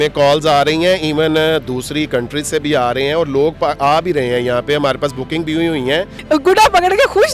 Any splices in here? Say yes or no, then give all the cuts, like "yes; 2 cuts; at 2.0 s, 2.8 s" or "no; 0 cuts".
yes; 1 cut; at 6.1 s